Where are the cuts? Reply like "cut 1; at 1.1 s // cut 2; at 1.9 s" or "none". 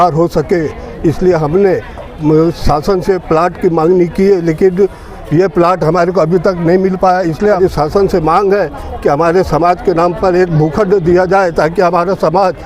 cut 1; at 7.6 s